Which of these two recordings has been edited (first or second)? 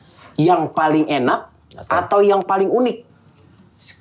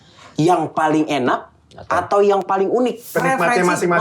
second